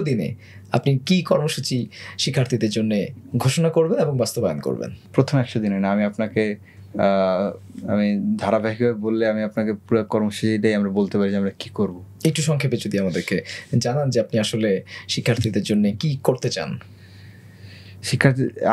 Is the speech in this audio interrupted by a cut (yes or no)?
no